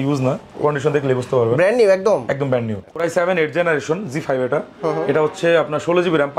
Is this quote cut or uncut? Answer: cut